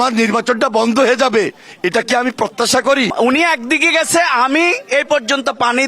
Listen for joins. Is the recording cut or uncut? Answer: cut